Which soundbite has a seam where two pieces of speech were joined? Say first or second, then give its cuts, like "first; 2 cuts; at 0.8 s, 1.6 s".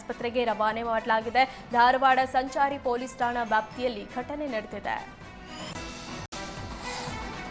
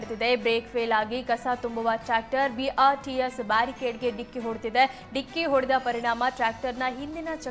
first; 1 cut; at 6.3 s